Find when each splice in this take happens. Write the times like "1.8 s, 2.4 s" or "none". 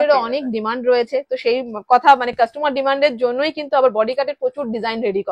none